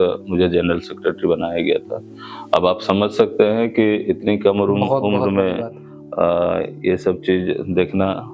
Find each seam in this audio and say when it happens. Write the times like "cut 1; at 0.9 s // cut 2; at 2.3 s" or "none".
none